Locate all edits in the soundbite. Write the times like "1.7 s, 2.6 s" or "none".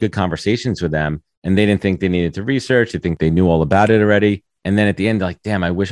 3.1 s, 4.5 s